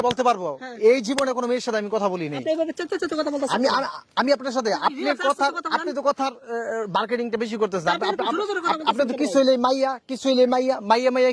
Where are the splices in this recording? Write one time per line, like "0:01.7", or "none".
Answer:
none